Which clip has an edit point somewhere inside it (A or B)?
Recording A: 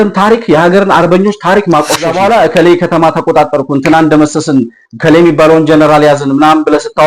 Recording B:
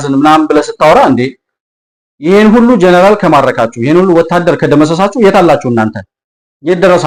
A